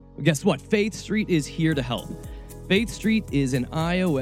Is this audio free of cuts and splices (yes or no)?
yes